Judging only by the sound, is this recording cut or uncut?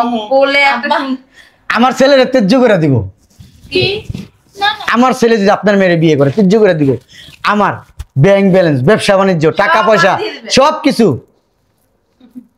uncut